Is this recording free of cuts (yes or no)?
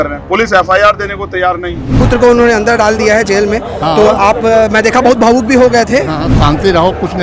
no